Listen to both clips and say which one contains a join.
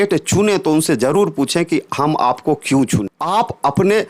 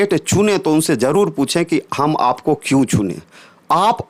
first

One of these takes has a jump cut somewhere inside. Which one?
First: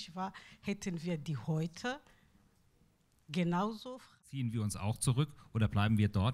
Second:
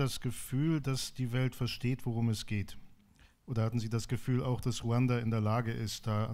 first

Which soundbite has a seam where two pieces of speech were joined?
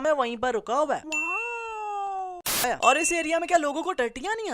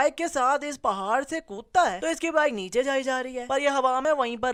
first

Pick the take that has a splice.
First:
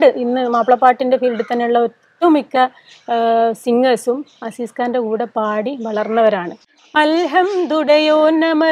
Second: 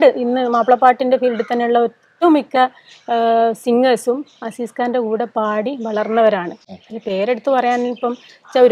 first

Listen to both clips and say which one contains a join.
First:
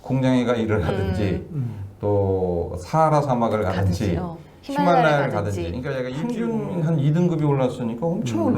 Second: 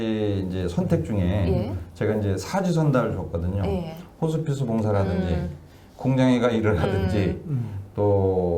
first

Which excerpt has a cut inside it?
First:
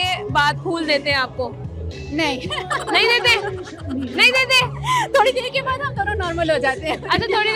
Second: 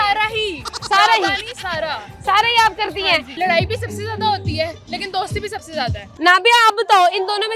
second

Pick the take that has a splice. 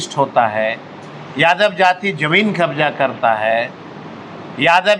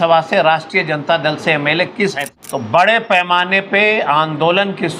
second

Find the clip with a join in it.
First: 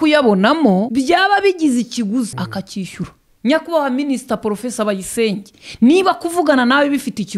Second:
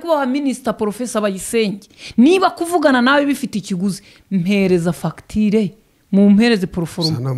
first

